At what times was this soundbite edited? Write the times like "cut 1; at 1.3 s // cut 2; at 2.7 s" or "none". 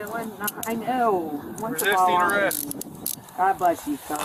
none